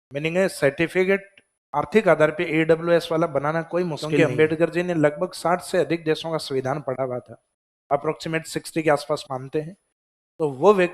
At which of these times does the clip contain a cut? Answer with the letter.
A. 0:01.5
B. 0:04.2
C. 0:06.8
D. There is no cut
B